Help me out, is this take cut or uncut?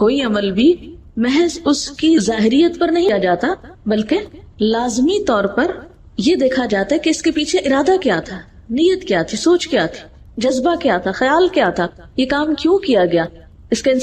cut